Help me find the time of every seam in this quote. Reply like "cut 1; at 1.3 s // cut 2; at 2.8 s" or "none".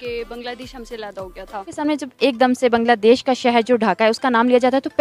cut 1; at 1.8 s